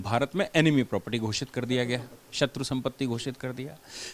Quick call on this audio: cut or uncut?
uncut